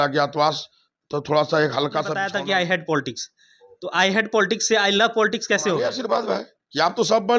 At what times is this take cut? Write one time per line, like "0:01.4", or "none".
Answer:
0:02.2
0:05.8